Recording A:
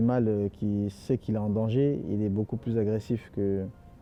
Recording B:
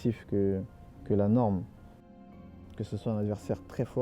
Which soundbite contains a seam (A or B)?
B